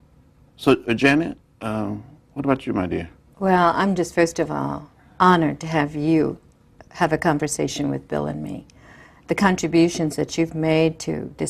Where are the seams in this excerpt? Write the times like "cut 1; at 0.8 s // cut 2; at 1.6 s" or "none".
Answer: cut 1; at 7.7 s